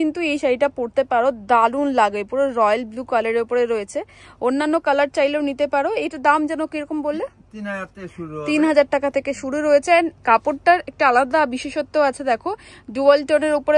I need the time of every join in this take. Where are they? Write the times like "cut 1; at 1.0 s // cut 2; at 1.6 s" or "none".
none